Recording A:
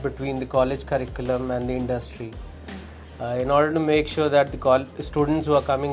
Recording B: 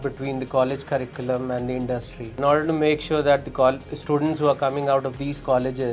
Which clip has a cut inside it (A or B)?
B